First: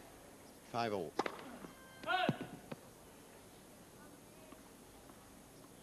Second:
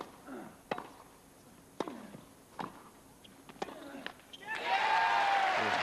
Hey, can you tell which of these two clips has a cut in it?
second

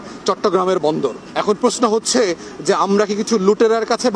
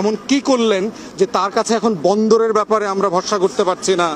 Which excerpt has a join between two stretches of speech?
first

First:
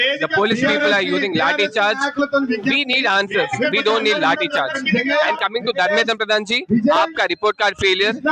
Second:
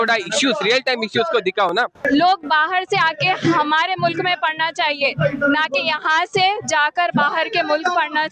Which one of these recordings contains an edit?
second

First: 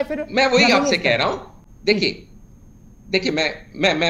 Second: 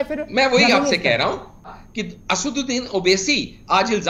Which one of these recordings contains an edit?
second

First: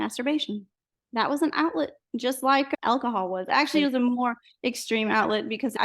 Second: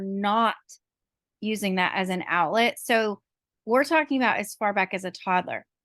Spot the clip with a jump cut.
first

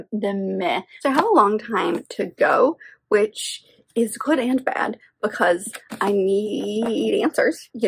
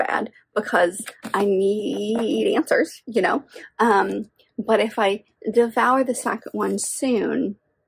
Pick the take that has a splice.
first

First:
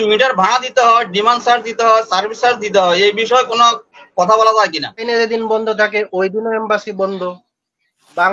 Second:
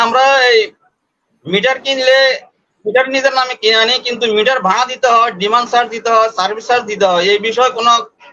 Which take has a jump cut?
first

